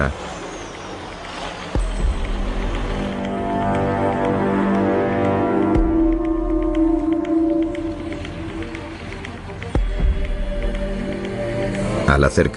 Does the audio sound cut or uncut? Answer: cut